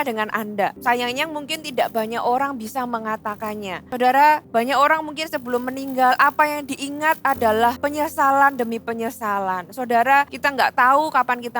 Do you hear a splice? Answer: yes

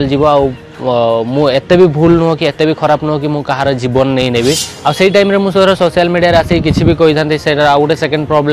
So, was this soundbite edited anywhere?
yes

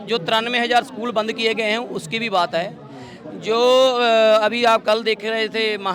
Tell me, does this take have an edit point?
no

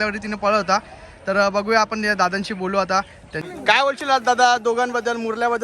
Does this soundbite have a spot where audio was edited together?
yes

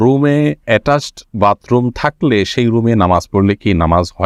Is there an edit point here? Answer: no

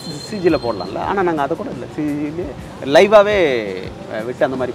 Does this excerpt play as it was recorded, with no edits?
yes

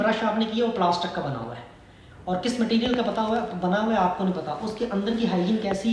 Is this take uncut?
yes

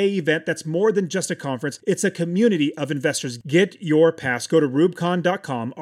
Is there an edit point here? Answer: no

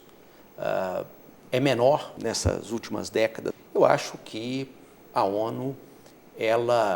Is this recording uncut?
no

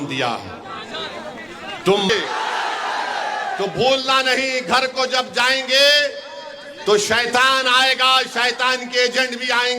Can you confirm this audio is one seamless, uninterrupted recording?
no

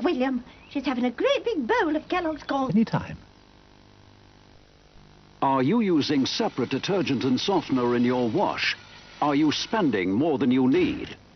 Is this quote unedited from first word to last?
yes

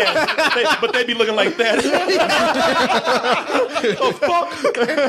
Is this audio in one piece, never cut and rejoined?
yes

